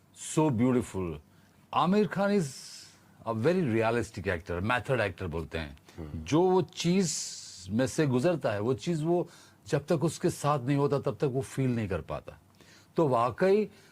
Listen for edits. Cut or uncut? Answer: cut